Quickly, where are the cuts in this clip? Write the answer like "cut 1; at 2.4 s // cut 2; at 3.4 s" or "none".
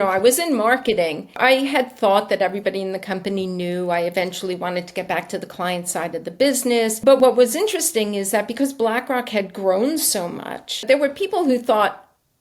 cut 1; at 1.4 s // cut 2; at 7.1 s // cut 3; at 10.8 s